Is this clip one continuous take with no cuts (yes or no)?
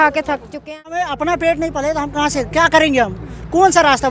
no